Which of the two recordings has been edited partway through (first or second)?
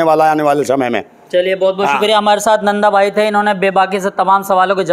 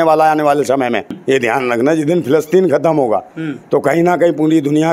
second